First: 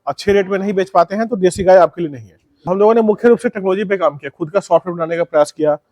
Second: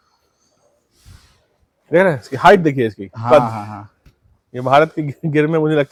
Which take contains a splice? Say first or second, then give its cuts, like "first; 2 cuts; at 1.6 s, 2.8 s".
first; 1 cut; at 2.6 s